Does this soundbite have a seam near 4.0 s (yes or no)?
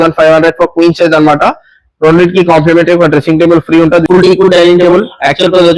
yes